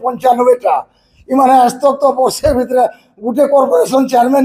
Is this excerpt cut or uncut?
uncut